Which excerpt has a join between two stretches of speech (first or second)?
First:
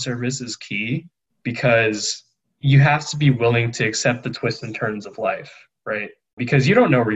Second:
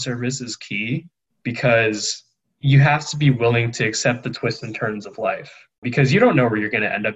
second